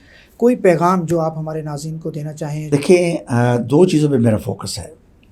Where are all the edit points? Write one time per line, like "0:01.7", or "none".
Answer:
0:02.7